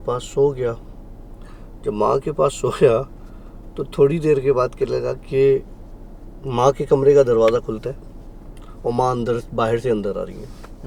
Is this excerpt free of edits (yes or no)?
yes